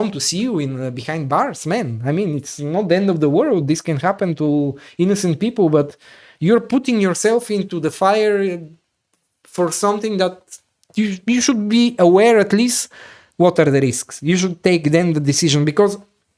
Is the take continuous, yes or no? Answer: yes